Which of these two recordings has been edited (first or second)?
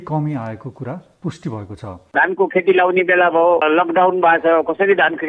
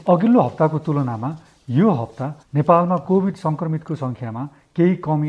first